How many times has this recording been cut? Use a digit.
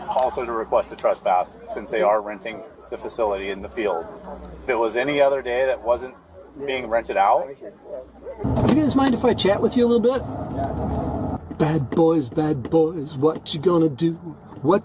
4